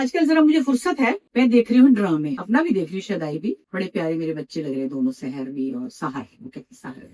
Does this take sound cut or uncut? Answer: cut